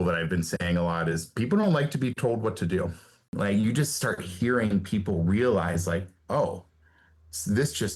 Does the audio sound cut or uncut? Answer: cut